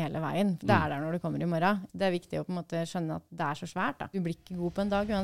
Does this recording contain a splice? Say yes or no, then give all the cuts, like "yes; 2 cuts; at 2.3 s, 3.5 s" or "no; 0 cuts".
yes; 2 cuts; at 1.8 s, 4.1 s